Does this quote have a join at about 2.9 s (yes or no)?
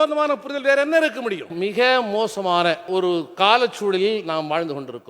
yes